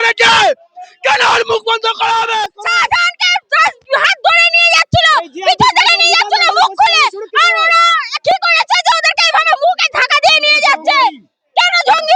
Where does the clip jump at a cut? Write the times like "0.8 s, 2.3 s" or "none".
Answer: 2.5 s